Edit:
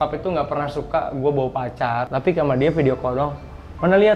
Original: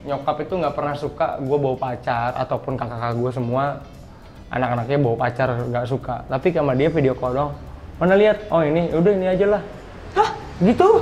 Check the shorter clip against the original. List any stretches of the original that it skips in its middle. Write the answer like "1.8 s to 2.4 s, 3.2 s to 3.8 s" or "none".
2.3 s to 6.3 s